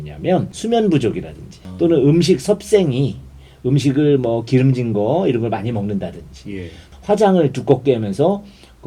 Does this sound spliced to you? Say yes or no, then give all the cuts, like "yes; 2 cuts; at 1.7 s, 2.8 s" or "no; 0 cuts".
yes; 1 cut; at 6.8 s